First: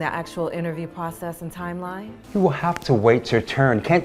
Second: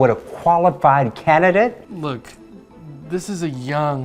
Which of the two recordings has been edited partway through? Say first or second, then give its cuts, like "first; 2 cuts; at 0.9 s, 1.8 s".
second; 1 cut; at 1.8 s